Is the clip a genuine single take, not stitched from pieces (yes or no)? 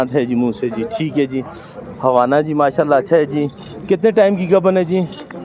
yes